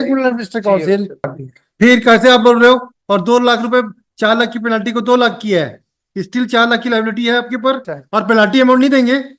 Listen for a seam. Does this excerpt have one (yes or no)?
yes